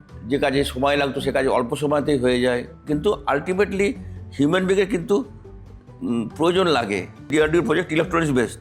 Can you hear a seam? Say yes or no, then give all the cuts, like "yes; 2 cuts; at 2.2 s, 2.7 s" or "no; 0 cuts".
yes; 2 cuts; at 2.7 s, 7.3 s